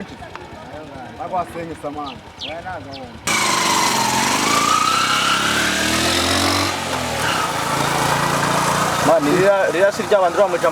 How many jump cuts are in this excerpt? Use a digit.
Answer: 1